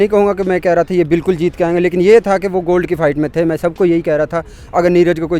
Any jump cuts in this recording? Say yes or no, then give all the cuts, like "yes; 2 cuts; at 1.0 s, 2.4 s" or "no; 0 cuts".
no; 0 cuts